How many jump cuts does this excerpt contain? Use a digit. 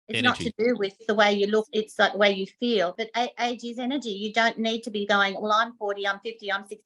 3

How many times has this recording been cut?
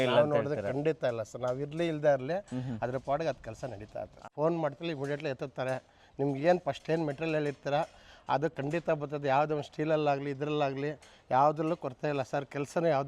1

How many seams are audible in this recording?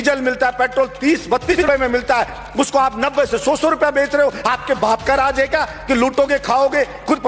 1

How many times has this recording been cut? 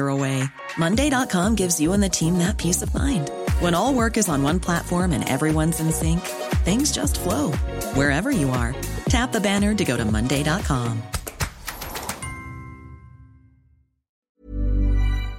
1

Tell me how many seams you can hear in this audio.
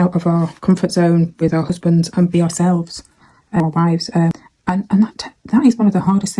2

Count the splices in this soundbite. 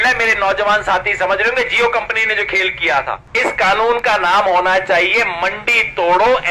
1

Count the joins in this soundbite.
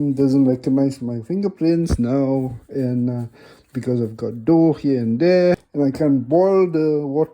1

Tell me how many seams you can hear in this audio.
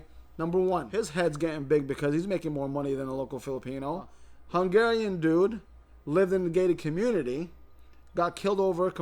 2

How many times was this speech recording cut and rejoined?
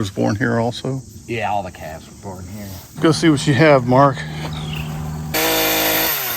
1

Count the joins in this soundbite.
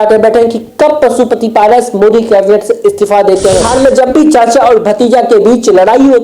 1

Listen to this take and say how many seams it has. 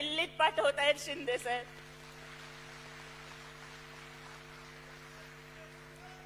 0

